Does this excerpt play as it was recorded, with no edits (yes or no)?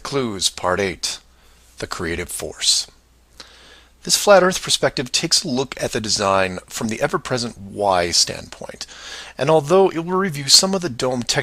yes